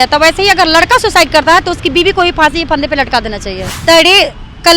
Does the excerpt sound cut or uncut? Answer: cut